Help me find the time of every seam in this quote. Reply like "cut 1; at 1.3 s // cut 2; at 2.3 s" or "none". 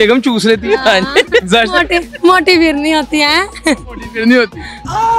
none